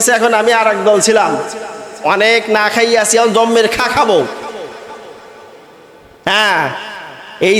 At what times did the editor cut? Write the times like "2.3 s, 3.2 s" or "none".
none